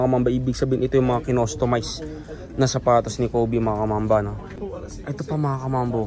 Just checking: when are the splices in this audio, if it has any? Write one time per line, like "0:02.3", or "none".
0:04.5

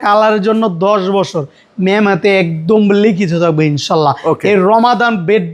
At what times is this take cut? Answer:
none

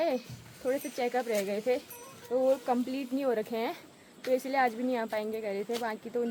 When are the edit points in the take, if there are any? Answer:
none

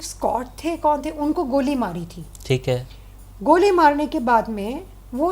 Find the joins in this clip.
0:03.0

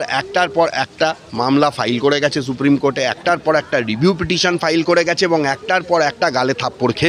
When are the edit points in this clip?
none

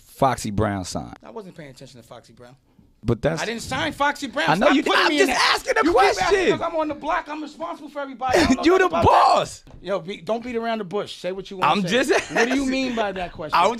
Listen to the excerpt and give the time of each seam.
0:01.2
0:03.0
0:09.7

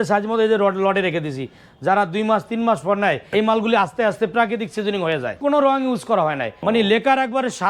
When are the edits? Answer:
0:03.2
0:05.3
0:06.5

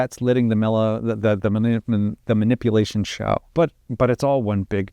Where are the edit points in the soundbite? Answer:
0:03.5

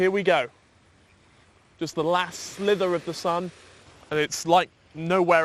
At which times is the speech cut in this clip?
none

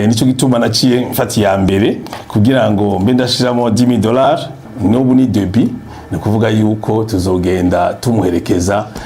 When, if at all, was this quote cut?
0:04.6

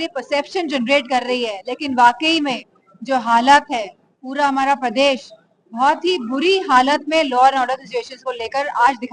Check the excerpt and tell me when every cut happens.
none

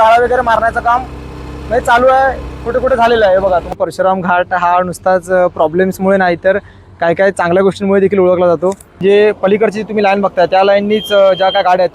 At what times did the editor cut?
0:03.7
0:08.9

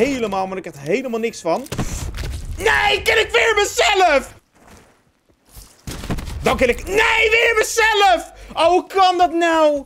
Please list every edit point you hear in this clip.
0:04.4

